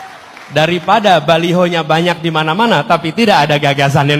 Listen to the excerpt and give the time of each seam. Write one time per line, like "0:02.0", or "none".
none